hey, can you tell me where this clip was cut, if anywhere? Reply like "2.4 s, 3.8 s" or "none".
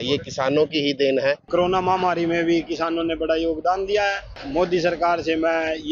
1.4 s, 4.3 s